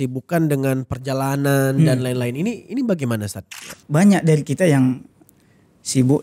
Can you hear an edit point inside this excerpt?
yes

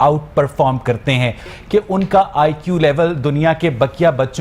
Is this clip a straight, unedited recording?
no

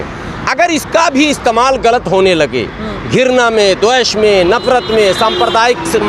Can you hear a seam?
no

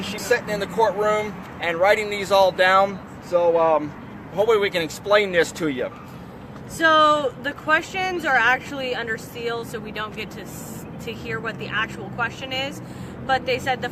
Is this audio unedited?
no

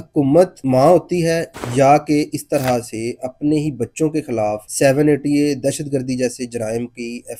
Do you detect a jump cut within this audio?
no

